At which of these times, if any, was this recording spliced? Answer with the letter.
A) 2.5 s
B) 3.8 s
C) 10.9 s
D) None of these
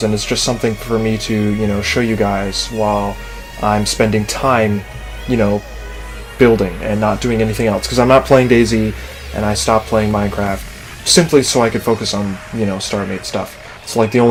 D